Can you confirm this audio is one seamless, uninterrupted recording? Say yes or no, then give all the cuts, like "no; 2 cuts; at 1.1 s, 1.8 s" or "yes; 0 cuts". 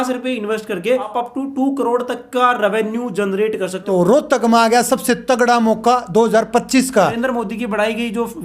no; 3 cuts; at 1.1 s, 3.9 s, 7.2 s